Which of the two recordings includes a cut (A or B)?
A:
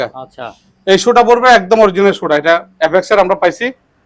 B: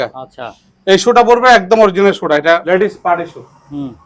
B